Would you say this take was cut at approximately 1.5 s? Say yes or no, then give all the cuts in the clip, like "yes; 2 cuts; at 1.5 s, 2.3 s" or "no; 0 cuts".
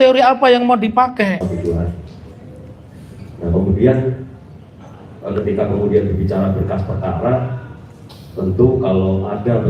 yes; 1 cut; at 1.5 s